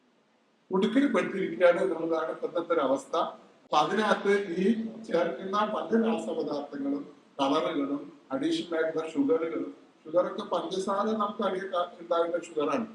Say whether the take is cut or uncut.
uncut